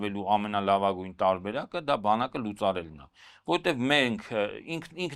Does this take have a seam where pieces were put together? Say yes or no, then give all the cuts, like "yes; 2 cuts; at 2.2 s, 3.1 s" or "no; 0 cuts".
no; 0 cuts